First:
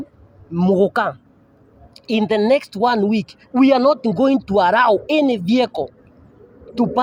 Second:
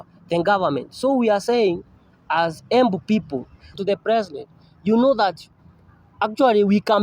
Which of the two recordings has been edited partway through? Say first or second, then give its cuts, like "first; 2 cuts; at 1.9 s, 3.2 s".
second; 1 cut; at 3.8 s